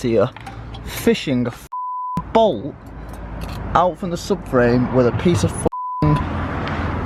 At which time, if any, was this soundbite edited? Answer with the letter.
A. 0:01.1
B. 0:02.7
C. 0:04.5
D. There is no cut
D